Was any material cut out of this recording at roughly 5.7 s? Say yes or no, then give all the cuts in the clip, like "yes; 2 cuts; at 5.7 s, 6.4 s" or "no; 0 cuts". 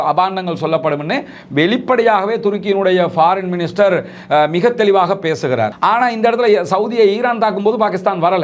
yes; 1 cut; at 5.7 s